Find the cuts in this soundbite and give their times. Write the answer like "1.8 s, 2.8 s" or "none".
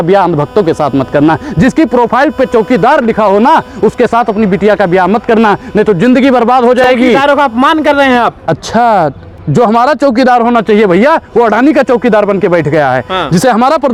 none